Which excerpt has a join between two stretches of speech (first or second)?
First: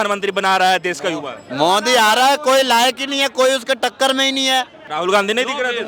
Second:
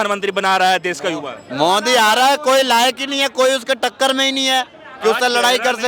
first